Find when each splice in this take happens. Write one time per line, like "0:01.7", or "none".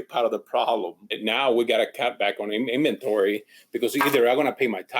0:01.2